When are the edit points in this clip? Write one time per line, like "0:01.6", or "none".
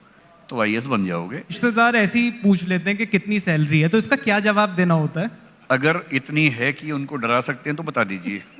0:01.6
0:05.5